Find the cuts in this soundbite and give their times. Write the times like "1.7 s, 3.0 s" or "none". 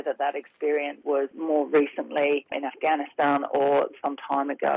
1.2 s, 2.6 s